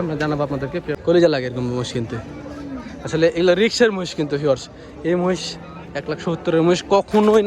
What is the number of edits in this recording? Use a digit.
1